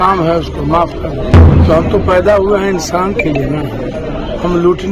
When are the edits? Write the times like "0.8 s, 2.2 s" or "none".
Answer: 1.5 s, 3.9 s